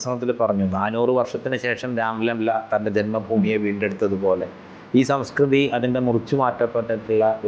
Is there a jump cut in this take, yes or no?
no